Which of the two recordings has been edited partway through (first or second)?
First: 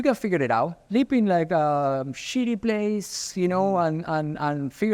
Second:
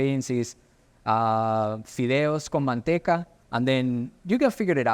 second